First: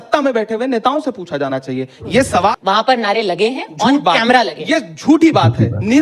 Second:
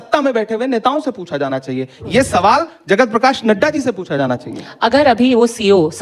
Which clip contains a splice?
first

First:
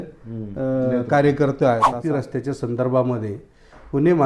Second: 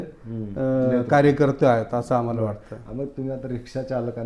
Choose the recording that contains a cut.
first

